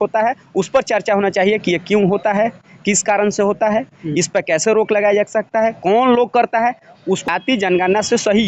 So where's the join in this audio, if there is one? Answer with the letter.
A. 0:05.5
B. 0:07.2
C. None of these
B